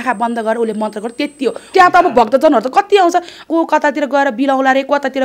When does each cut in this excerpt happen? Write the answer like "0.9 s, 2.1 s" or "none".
1.6 s, 3.4 s